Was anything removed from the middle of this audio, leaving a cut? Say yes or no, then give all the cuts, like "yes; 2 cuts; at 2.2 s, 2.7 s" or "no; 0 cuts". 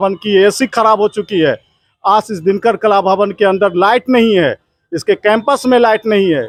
no; 0 cuts